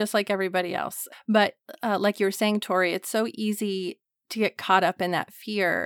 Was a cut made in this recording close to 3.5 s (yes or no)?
no